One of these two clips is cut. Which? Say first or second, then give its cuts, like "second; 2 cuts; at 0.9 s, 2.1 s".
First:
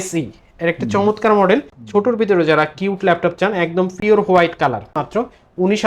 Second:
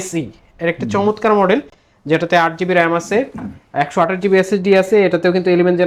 first; 2 cuts; at 1.8 s, 4.9 s